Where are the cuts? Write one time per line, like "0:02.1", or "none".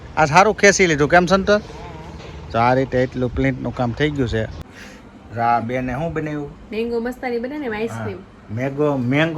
0:04.6